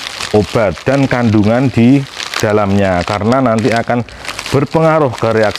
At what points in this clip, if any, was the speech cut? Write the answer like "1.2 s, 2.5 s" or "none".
none

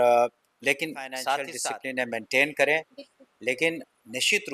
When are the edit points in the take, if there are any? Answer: 1.5 s

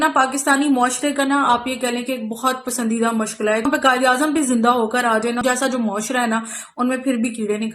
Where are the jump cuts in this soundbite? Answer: 3.7 s, 5.4 s

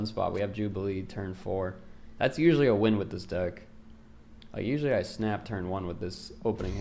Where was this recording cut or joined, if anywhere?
none

